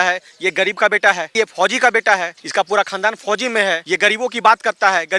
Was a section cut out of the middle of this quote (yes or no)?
yes